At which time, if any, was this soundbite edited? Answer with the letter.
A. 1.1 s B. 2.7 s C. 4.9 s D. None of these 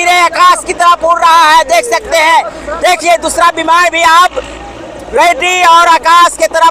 D